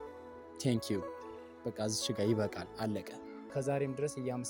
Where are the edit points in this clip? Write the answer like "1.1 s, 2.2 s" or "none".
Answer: 3.5 s

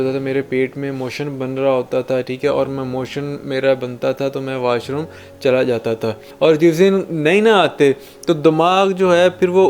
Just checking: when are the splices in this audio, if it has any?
6.2 s

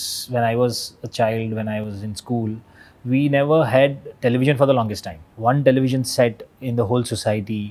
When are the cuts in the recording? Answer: none

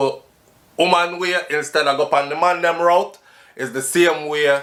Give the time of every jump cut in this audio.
none

